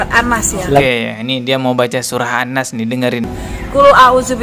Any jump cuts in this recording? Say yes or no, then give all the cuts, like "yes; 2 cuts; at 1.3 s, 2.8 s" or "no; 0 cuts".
yes; 1 cut; at 3.3 s